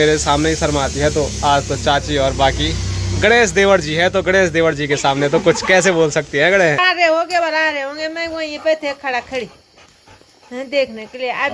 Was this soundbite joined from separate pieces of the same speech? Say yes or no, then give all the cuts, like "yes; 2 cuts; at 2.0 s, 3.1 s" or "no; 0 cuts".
yes; 1 cut; at 6.8 s